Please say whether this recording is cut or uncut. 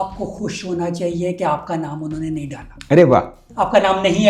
uncut